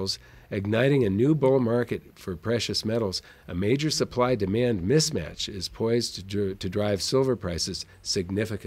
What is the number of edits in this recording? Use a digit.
0